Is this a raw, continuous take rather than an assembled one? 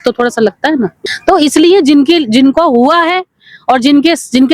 no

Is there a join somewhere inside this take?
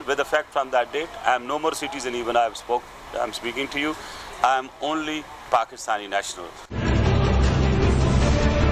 no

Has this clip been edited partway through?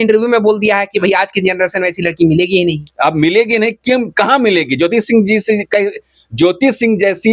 no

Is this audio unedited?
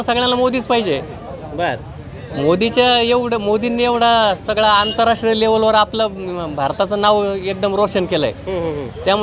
yes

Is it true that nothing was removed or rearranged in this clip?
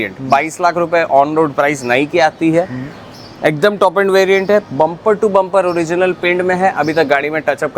yes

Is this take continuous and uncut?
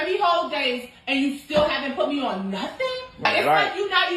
no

